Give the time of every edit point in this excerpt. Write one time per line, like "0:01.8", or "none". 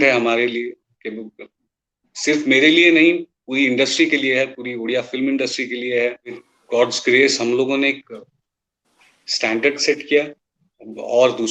0:06.5